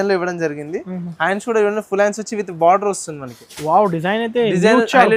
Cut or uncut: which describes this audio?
uncut